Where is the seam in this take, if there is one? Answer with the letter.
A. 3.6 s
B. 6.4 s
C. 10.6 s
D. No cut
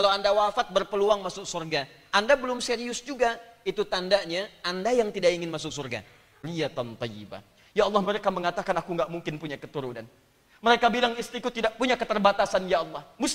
B